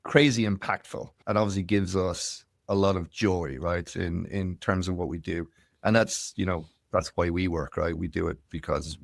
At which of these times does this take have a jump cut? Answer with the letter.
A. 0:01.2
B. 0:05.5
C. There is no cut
A